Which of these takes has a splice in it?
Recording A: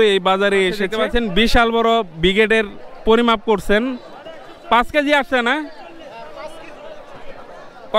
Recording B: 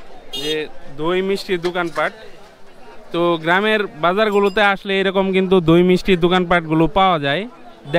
A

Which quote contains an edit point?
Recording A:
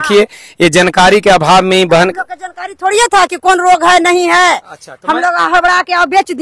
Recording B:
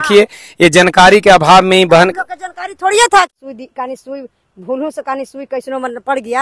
B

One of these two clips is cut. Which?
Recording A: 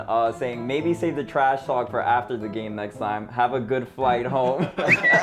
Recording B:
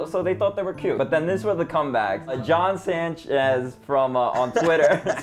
B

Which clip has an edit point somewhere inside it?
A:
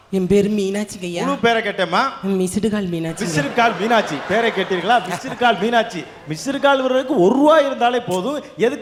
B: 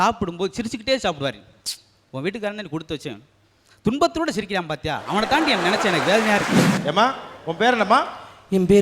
B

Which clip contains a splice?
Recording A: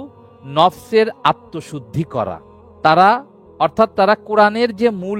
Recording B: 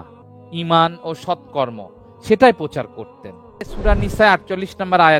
B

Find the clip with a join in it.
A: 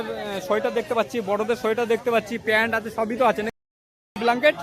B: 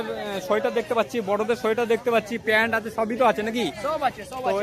A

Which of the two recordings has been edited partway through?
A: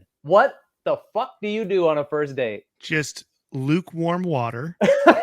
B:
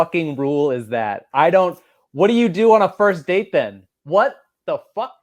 A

